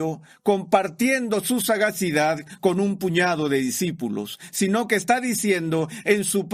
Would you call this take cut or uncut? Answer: uncut